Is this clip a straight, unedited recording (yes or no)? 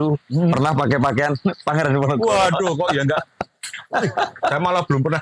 yes